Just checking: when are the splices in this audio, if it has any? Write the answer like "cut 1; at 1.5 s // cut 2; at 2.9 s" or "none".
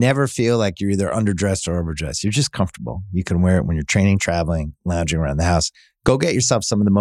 none